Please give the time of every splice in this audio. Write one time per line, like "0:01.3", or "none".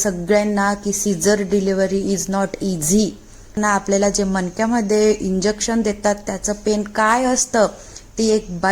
0:03.6